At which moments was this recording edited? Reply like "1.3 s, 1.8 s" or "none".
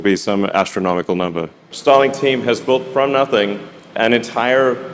1.6 s